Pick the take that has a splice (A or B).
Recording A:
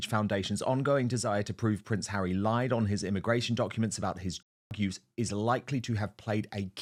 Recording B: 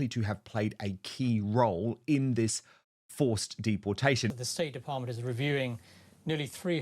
B